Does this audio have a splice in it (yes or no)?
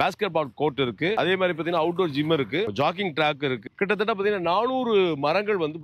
no